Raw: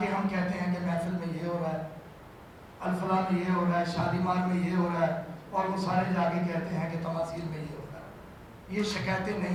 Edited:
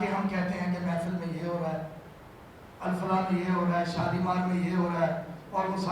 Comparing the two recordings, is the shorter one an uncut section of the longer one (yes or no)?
yes